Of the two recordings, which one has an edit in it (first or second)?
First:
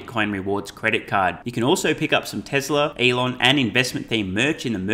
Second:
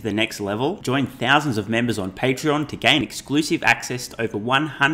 first